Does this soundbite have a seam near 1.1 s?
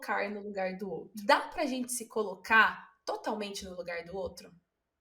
yes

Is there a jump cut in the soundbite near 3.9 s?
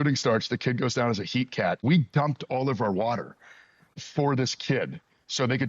yes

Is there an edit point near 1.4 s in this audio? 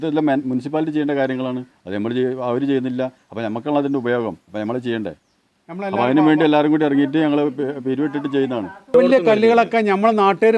no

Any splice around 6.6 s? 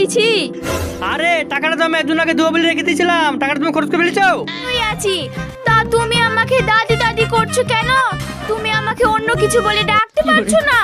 no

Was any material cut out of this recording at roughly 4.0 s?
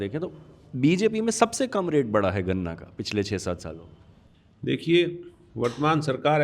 no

